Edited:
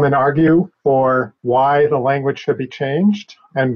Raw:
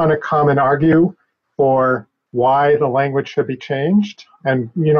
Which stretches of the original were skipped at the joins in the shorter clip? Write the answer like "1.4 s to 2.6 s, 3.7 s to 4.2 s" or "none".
1.5 s to 2.0 s